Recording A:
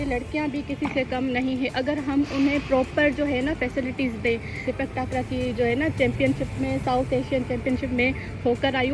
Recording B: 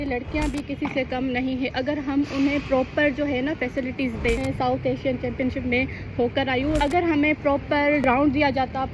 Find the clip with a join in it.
B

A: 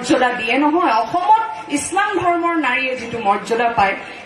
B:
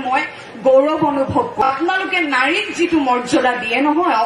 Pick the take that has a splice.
B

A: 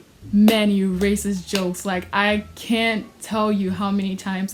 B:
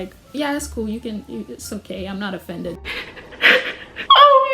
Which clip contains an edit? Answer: B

